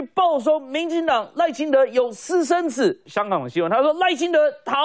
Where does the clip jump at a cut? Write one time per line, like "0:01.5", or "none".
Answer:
0:03.1